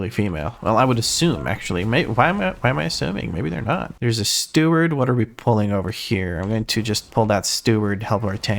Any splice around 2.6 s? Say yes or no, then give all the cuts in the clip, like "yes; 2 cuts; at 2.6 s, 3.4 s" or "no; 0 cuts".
no; 1 cut; at 3.9 s